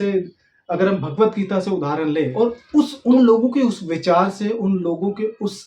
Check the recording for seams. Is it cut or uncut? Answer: cut